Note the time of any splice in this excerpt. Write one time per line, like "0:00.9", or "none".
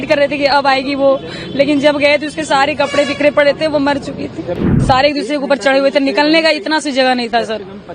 0:04.7